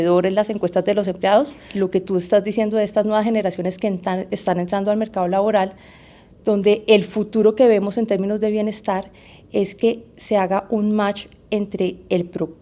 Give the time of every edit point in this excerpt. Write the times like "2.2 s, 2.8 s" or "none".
1.6 s